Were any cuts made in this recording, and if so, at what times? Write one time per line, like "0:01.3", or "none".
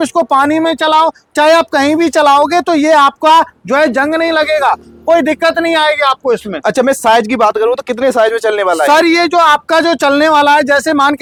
none